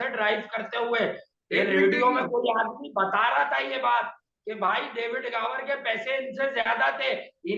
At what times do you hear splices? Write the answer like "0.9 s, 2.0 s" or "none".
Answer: none